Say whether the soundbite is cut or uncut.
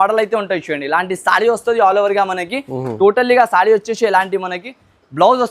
uncut